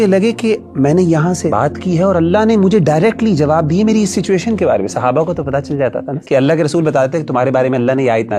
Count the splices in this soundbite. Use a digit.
2